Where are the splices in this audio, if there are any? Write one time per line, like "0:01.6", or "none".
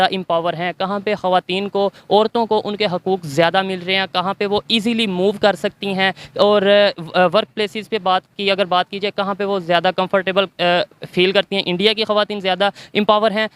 none